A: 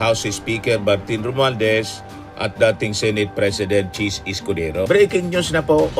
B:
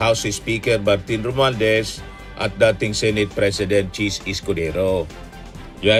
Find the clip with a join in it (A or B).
A